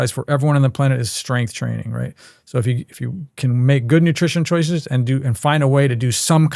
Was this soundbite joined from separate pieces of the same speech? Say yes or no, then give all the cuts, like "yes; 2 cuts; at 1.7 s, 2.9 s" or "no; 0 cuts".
no; 0 cuts